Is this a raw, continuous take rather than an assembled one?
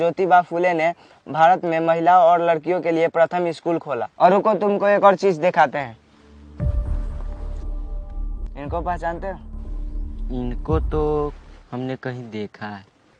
yes; 0 cuts

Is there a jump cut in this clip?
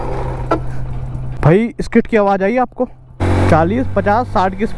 yes; 2 cuts; at 1.3 s, 3.2 s

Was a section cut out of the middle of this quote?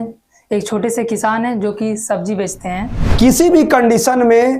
yes; 1 cut; at 3.0 s

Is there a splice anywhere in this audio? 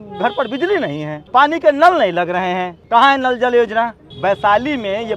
yes; 3 cuts; at 1.1 s, 2.7 s, 4.0 s

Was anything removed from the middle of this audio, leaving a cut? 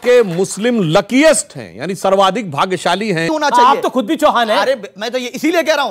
yes; 1 cut; at 3.3 s

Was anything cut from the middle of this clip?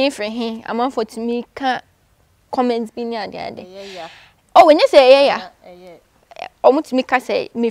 no; 0 cuts

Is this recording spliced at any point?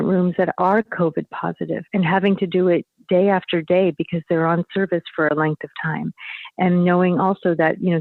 no; 0 cuts

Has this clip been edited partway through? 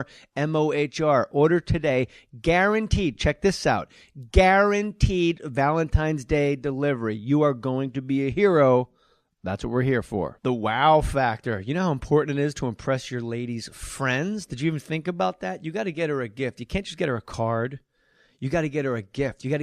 yes; 1 cut; at 8.5 s

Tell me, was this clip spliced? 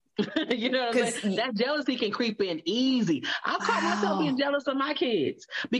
no; 0 cuts

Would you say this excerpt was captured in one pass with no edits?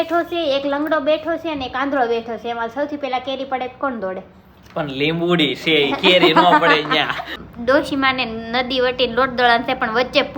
no; 1 cut; at 7.2 s

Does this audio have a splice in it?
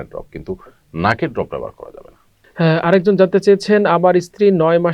no; 0 cuts

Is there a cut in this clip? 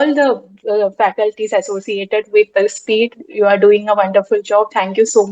no; 0 cuts

